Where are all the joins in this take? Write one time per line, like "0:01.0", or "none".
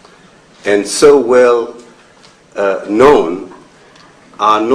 0:03.7